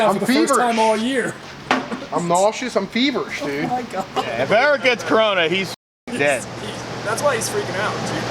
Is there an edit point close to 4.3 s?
yes; 1 cut; at 4.3 s

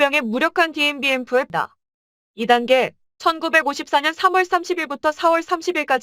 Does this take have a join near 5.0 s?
no; 1 cut; at 1.5 s

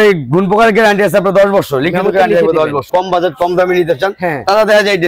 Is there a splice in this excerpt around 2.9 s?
yes; 1 cut; at 2.9 s

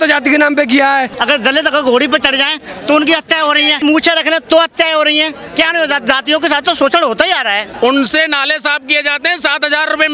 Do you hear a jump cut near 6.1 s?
no; 2 cuts; at 1.2 s, 7.7 s

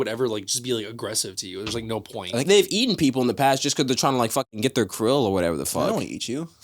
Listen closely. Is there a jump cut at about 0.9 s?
no; 1 cut; at 2.4 s

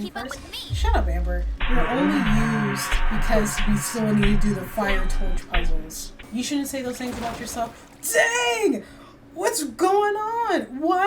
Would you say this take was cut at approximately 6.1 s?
yes; 1 cut; at 6.1 s

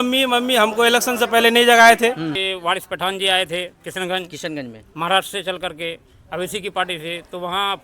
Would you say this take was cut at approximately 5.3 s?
no; 1 cut; at 2.4 s

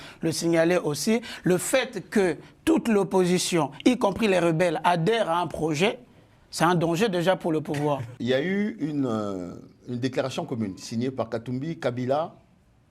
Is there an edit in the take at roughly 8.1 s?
yes; 1 cut; at 8.1 s

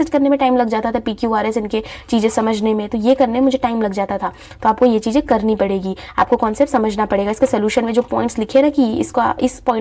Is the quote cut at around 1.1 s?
no; 0 cuts

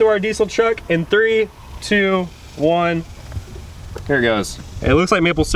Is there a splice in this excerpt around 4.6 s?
yes; 1 cut; at 4.6 s

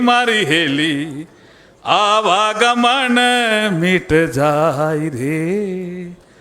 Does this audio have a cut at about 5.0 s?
no; 1 cut; at 3.8 s

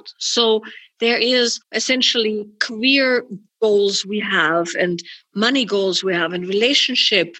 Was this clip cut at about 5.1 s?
no; 2 cuts; at 1.7 s, 3.4 s

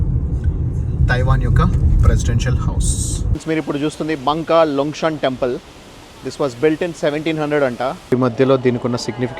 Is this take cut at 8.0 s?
yes; 2 cuts; at 3.3 s, 8.0 s

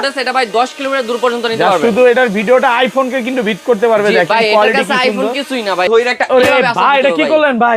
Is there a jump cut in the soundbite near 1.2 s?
no; 1 cut; at 5.9 s

